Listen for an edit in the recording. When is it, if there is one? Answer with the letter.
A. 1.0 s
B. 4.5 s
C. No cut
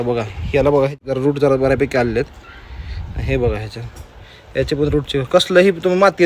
A